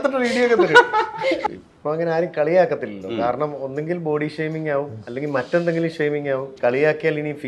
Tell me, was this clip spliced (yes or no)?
yes